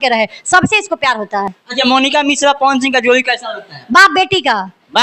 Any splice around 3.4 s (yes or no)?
no